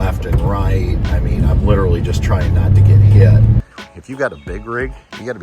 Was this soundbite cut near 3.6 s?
yes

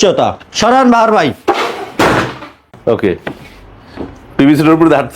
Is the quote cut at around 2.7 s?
yes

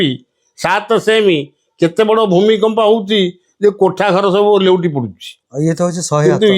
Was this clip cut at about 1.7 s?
no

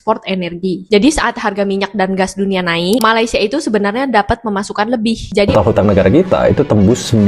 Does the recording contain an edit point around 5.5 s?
yes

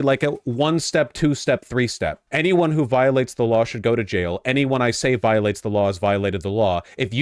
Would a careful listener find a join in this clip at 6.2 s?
no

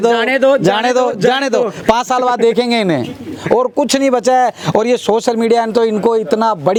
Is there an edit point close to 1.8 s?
no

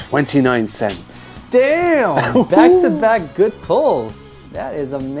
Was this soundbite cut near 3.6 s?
no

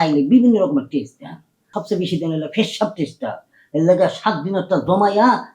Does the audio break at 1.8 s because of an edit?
yes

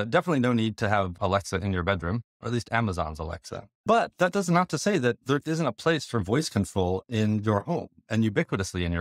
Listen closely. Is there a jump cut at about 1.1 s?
yes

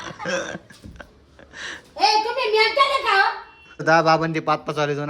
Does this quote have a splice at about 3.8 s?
yes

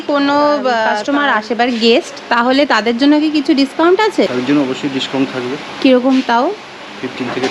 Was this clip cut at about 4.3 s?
yes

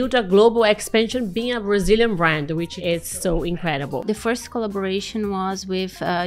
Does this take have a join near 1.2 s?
no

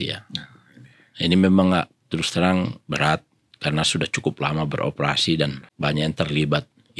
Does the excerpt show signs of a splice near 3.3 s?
no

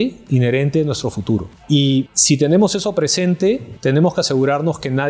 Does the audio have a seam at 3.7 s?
yes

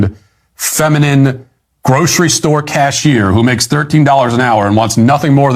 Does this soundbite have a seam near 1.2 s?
no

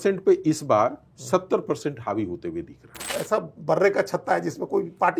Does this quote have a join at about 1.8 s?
no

